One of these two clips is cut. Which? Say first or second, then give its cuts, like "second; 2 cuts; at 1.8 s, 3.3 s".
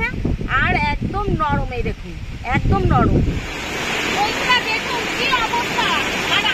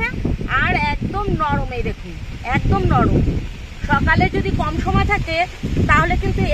first; 1 cut; at 3.7 s